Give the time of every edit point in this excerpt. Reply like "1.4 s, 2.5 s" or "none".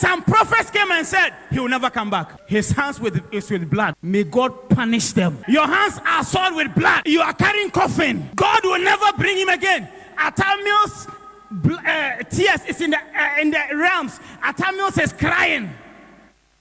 2.3 s, 4.0 s, 5.4 s, 7.0 s, 8.2 s